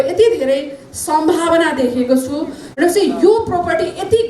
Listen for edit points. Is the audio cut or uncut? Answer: cut